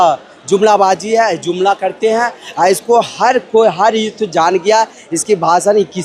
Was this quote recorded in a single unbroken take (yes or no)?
yes